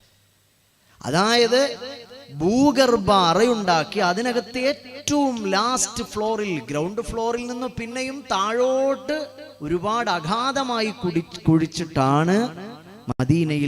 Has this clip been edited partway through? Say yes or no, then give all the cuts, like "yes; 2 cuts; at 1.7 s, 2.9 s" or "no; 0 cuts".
no; 0 cuts